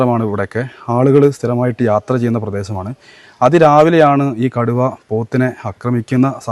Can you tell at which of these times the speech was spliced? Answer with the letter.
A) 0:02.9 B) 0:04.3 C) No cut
C